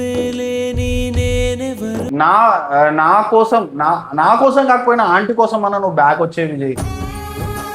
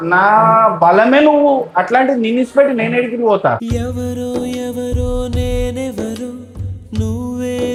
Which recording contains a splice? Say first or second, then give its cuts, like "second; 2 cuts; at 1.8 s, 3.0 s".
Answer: first; 1 cut; at 2.1 s